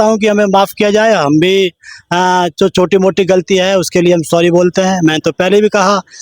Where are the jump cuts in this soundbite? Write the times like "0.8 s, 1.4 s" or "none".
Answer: none